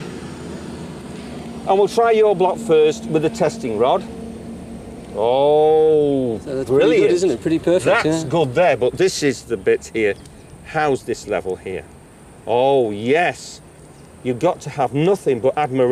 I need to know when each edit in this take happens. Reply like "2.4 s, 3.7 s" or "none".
9.5 s